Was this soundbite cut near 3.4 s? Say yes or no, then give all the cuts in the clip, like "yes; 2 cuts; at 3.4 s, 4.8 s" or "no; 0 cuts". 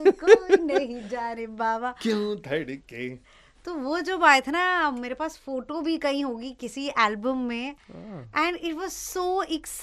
no; 0 cuts